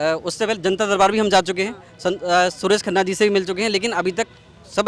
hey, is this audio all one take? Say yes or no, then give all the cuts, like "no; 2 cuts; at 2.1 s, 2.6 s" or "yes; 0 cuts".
yes; 0 cuts